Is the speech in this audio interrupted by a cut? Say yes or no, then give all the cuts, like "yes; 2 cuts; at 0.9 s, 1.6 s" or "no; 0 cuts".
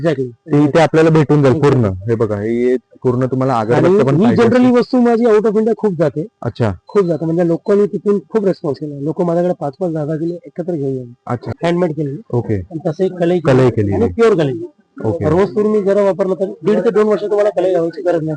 yes; 1 cut; at 11.5 s